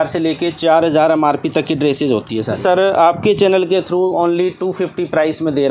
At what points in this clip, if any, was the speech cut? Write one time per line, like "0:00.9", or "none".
0:02.6